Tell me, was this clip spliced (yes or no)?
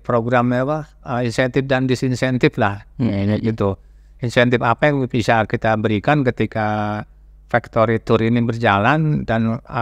no